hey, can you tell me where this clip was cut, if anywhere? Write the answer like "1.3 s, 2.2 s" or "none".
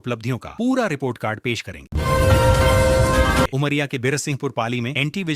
1.9 s, 3.5 s